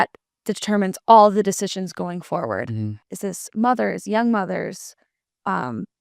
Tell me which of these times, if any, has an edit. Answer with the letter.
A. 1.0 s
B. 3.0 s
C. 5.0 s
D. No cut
B